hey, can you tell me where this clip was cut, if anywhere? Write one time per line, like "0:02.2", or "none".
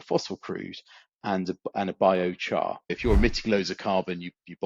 0:02.9